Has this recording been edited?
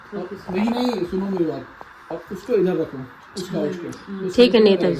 no; 0 cuts

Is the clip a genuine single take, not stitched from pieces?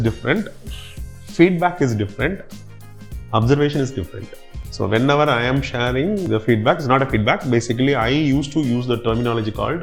yes; 0 cuts

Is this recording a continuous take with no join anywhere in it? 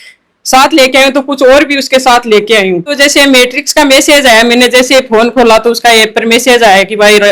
no; 1 cut; at 2.9 s

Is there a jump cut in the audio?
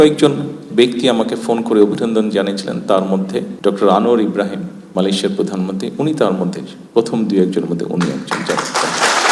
yes; 2 cuts; at 3.5 s, 4.8 s

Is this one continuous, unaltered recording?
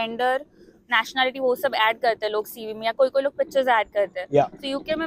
yes; 0 cuts

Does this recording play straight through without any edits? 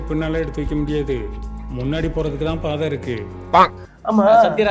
no; 1 cut; at 3.7 s

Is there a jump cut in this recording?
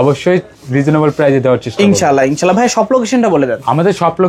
no; 0 cuts

